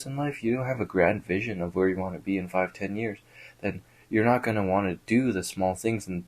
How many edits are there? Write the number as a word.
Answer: zero